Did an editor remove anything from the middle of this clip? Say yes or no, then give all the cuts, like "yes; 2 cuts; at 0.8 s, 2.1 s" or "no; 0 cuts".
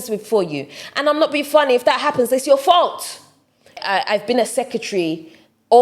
yes; 1 cut; at 3.7 s